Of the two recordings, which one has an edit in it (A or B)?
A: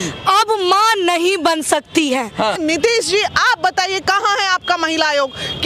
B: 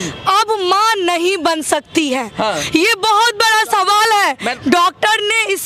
A